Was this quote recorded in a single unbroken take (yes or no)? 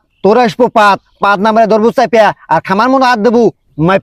yes